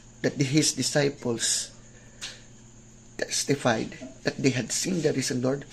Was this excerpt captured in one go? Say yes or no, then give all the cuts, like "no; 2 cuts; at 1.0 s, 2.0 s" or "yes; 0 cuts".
yes; 0 cuts